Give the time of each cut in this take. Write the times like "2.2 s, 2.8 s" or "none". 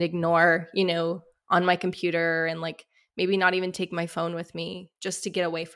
1.3 s